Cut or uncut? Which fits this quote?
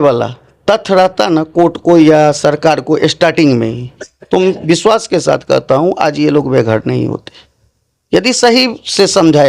uncut